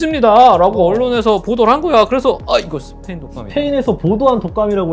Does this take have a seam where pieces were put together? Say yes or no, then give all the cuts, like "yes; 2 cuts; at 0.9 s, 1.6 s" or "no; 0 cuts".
no; 0 cuts